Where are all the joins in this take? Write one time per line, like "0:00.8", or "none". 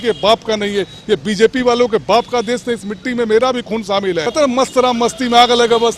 0:04.3